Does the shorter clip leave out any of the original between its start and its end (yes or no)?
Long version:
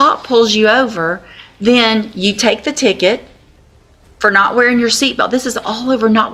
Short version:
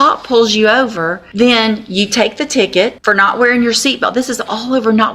yes